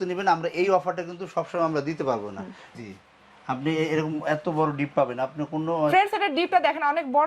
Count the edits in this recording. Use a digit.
1